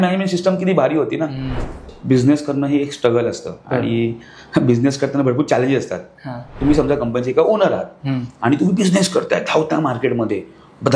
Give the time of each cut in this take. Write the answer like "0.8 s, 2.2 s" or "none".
1.8 s, 6.5 s